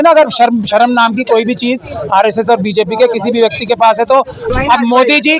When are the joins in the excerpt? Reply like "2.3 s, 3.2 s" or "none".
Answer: 4.4 s